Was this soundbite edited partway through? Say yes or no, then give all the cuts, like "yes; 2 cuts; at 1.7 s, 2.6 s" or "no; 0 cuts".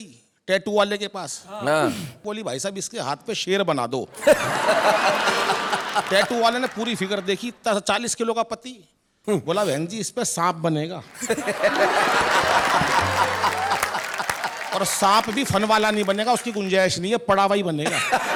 no; 0 cuts